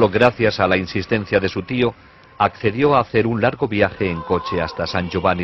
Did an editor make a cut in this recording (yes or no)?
no